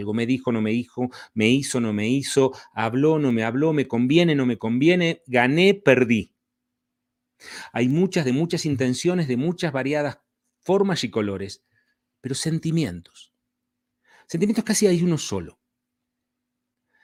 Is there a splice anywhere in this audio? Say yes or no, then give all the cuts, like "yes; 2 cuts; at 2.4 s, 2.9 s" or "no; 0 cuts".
no; 0 cuts